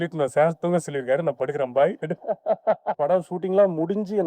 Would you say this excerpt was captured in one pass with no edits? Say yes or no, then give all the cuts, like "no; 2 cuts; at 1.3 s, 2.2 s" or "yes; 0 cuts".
no; 1 cut; at 3.0 s